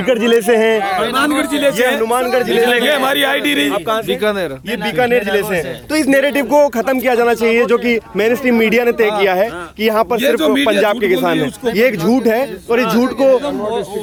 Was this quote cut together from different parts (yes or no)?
no